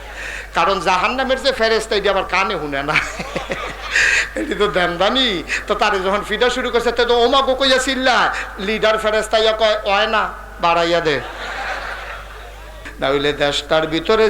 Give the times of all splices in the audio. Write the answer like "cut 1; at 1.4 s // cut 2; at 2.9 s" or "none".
cut 1; at 12.8 s

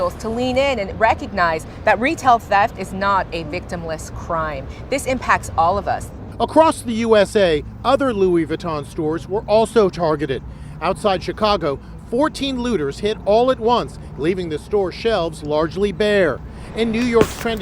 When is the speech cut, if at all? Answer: cut 1; at 2.9 s

